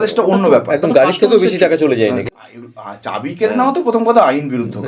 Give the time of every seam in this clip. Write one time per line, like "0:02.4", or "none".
0:02.2